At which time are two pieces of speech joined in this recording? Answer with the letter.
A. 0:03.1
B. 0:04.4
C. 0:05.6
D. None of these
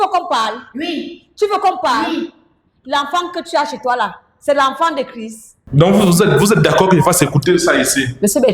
C